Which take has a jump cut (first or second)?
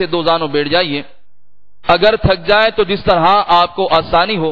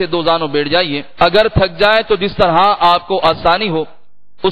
second